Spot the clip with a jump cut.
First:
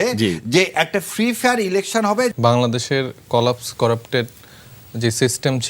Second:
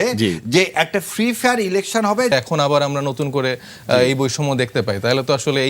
second; 1 cut; at 2.3 s

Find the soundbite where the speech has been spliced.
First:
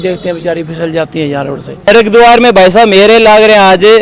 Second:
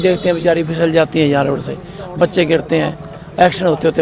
first; 1 cut; at 1.7 s

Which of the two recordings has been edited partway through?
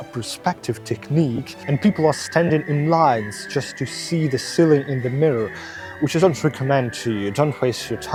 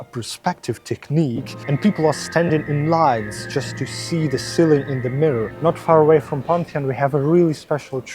second; 1 cut; at 5.5 s

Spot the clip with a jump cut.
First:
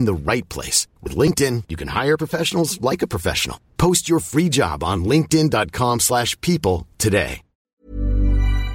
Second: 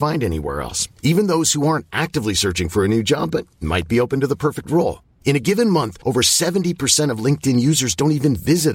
first; 1 cut; at 7.6 s

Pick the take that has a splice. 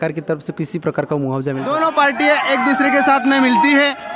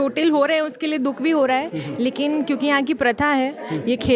first; 1 cut; at 1.8 s

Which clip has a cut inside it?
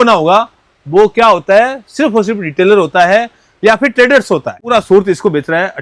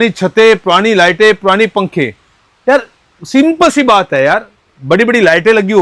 first; 1 cut; at 4.7 s

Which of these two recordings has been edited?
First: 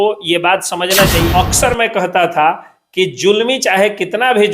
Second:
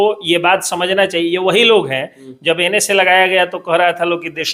first; 1 cut; at 1.3 s

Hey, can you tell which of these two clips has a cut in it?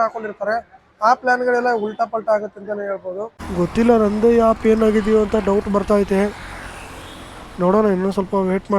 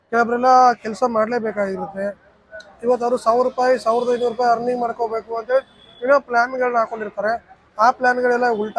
first; 1 cut; at 3.4 s

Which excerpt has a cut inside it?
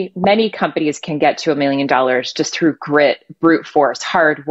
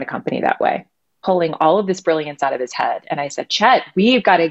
second; 1 cut; at 1.2 s

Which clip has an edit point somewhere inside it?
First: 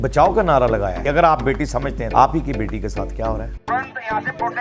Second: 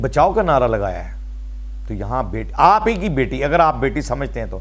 first; 3 cuts; at 1.0 s, 2.0 s, 3.7 s

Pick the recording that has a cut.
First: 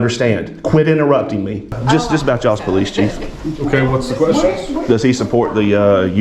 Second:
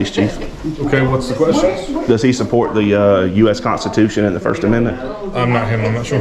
first; 1 cut; at 1.8 s

